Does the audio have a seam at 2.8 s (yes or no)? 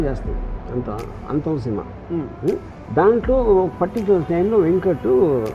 yes